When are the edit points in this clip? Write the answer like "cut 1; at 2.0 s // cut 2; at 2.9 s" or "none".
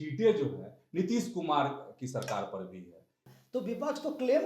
cut 1; at 3.2 s